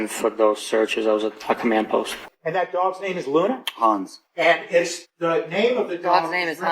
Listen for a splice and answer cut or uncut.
cut